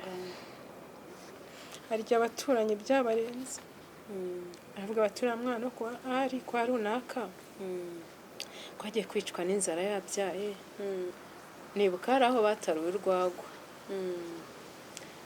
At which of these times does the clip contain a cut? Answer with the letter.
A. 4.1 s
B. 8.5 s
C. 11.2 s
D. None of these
C